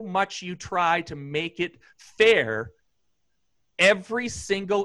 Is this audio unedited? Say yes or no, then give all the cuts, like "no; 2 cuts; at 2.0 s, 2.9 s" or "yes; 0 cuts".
yes; 0 cuts